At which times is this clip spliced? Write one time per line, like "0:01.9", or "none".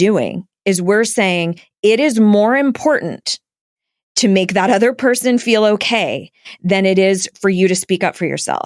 none